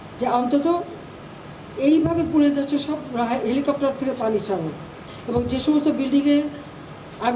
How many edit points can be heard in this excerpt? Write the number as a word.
one